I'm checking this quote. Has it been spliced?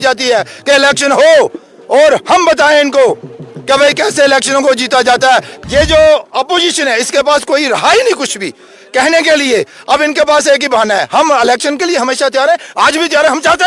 yes; 1 cut; at 5.5 s

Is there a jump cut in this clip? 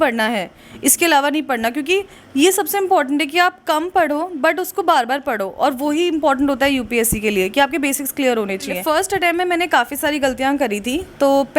yes; 1 cut; at 8.8 s

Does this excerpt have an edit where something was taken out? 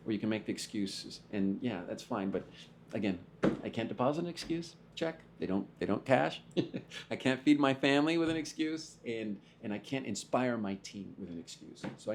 no; 0 cuts

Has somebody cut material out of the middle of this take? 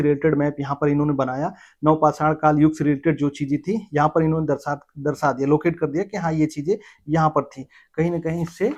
no; 0 cuts

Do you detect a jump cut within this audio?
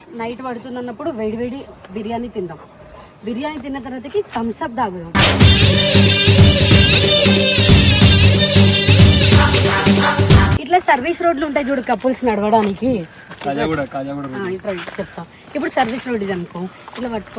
yes; 1 cut; at 10.6 s

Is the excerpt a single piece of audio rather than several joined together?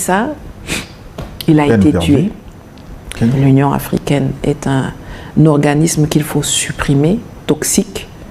no; 1 cut; at 3.4 s

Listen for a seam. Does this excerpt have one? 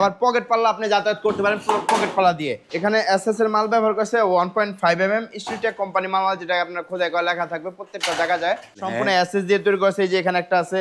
yes; 2 cuts; at 2.6 s, 8.9 s

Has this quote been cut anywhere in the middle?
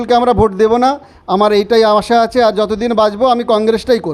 no; 0 cuts

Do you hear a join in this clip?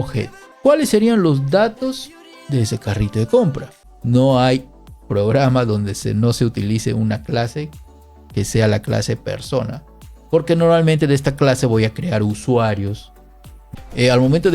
yes; 2 cuts; at 3.8 s, 13.6 s

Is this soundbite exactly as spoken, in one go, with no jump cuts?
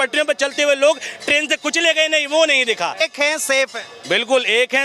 no; 1 cut; at 3.0 s

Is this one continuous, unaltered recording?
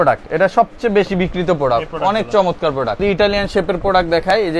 no; 1 cut; at 3.0 s

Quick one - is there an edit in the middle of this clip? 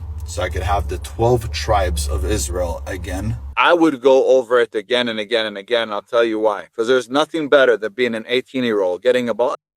yes; 1 cut; at 3.5 s

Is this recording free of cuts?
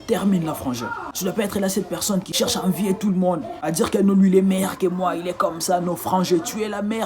no; 1 cut; at 2.3 s

